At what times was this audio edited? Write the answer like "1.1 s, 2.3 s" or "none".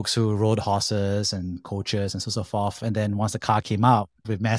none